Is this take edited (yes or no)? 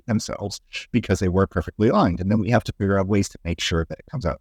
no